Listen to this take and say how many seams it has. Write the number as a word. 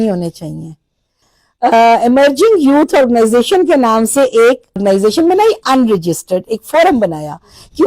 two